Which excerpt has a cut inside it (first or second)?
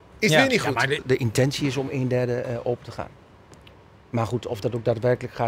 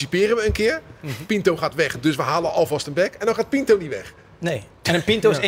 first